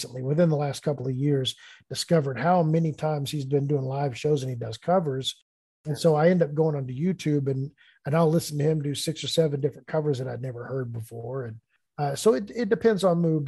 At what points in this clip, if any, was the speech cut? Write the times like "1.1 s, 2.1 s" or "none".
11.7 s

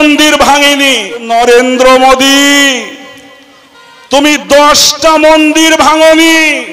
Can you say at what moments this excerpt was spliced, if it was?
1.2 s

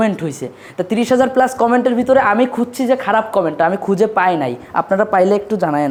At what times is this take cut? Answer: none

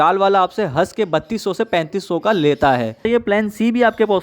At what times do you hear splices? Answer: 3.0 s

